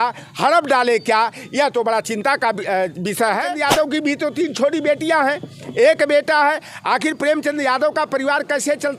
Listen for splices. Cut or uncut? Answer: cut